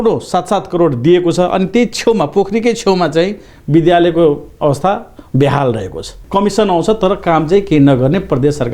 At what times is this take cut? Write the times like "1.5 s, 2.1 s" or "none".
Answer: 6.2 s